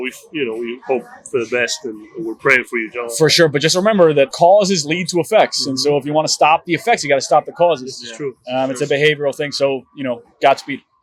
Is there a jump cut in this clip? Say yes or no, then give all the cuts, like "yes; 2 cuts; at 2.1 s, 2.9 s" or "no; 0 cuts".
no; 0 cuts